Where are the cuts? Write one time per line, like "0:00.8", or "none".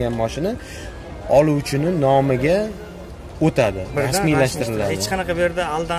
none